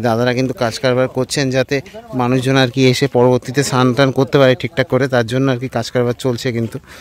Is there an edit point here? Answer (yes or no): no